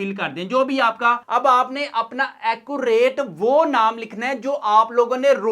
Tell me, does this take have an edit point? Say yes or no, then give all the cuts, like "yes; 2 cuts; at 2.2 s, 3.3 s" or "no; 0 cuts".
yes; 1 cut; at 1.2 s